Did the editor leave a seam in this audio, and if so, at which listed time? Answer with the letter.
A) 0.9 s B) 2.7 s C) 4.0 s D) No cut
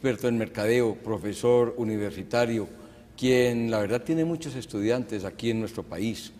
C